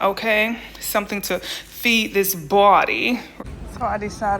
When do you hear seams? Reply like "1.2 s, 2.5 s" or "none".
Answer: 3.3 s